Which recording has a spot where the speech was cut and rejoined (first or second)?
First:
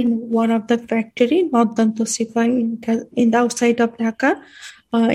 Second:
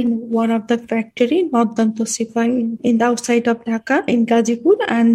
second